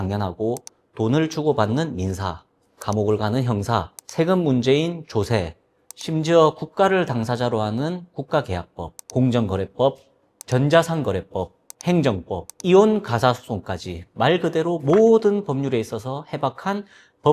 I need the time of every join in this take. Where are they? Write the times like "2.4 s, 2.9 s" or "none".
none